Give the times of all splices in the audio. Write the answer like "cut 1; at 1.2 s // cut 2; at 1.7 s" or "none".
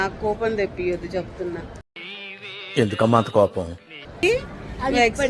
cut 1; at 4.2 s